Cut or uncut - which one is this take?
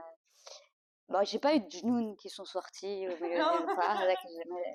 uncut